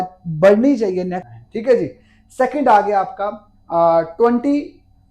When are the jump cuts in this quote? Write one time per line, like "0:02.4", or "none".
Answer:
0:01.3